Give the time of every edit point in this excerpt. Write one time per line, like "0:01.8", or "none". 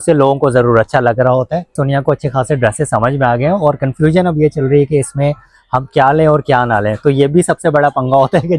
0:01.8

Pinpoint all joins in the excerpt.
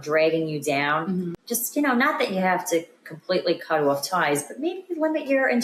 none

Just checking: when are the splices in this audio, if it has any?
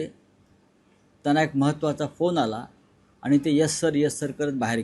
none

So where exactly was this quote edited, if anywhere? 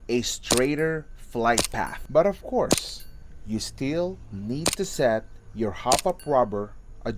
0:02.0

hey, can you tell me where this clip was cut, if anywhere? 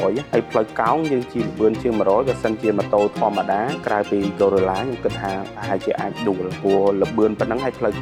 none

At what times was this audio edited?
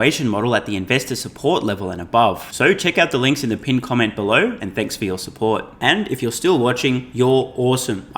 none

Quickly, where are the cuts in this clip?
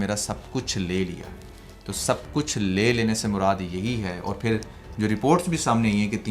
none

